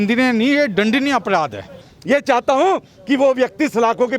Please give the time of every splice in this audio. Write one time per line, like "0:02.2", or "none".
0:01.9